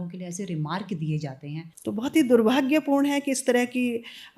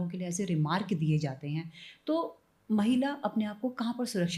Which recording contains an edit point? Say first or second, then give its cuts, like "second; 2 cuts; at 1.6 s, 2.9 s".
first; 1 cut; at 1.6 s